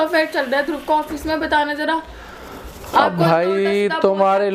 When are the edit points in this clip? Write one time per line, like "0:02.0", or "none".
none